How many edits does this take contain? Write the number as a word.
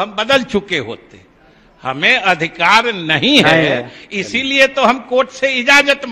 zero